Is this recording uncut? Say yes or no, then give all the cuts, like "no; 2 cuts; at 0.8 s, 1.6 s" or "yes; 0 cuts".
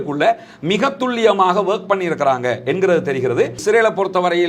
no; 1 cut; at 3.6 s